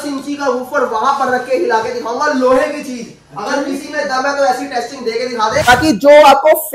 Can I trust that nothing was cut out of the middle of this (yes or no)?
no